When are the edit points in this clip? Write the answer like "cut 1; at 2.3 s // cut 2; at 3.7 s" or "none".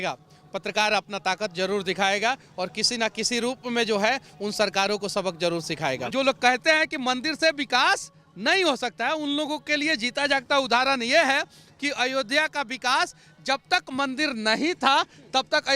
cut 1; at 6.0 s